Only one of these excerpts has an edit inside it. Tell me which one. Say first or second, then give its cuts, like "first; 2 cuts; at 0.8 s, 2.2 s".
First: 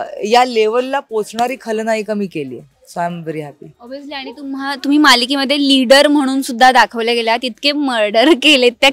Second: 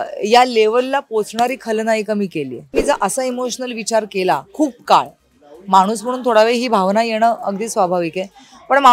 second; 1 cut; at 2.7 s